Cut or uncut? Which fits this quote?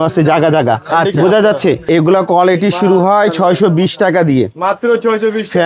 cut